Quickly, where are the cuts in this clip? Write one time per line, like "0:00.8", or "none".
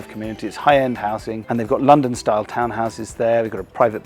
none